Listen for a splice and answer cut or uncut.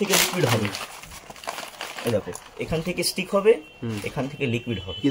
uncut